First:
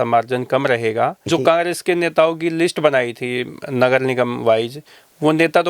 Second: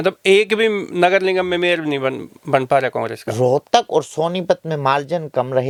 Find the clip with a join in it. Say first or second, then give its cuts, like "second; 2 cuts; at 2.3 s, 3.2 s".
first; 1 cut; at 1.3 s